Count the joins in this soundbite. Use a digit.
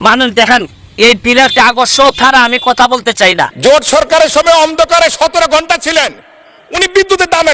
1